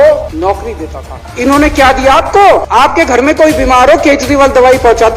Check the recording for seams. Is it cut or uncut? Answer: cut